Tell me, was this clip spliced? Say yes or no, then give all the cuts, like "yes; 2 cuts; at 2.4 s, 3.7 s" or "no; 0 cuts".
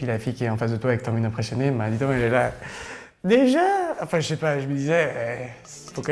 no; 0 cuts